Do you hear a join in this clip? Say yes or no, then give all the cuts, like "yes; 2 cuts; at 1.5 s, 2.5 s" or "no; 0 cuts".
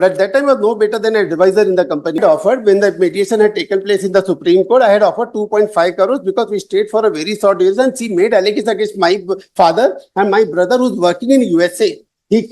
yes; 1 cut; at 2.2 s